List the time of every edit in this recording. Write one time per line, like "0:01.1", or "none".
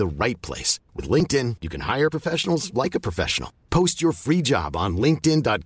none